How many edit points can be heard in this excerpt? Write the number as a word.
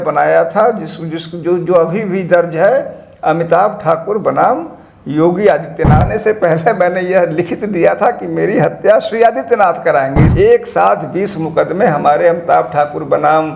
two